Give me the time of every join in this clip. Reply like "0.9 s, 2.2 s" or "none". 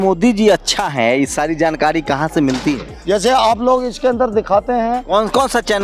2.9 s, 5.0 s